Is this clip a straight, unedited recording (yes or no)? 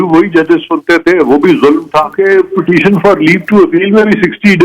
no